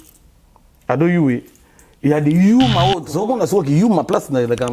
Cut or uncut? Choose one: cut